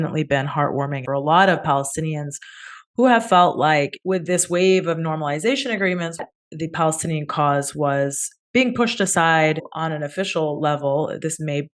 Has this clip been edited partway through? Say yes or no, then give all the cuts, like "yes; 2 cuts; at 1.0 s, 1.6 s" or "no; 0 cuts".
yes; 3 cuts; at 1.0 s, 6.2 s, 9.6 s